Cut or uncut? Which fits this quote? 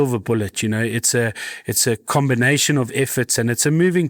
uncut